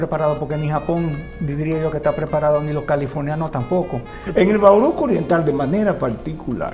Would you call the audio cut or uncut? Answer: cut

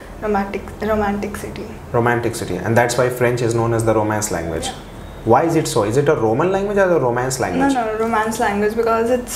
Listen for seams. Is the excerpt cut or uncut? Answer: uncut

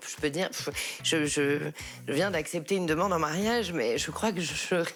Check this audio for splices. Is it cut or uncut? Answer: uncut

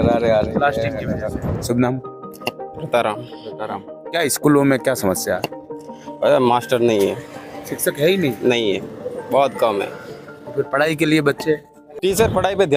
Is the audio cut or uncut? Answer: uncut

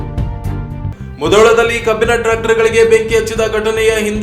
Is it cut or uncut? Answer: cut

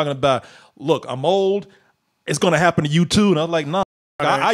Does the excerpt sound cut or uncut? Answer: uncut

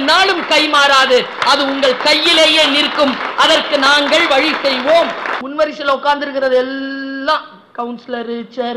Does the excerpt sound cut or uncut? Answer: cut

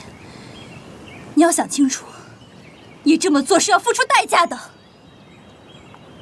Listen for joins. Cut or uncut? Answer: uncut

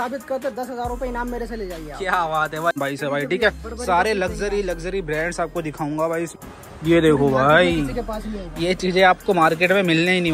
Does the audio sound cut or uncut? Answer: cut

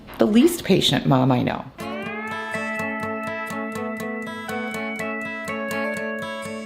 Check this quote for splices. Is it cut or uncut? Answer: uncut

